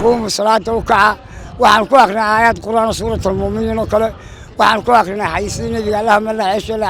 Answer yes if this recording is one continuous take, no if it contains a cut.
yes